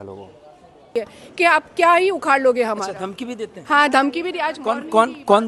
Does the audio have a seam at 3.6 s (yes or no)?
no